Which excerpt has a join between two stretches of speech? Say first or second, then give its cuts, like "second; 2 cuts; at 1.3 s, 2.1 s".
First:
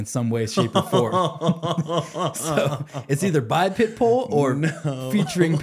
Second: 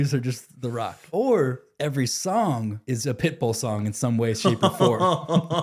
second; 3 cuts; at 1.0 s, 1.7 s, 2.8 s